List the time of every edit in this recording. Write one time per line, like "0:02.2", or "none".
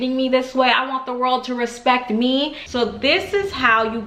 0:02.6